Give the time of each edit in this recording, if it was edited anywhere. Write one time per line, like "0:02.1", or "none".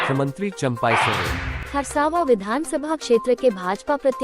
0:01.6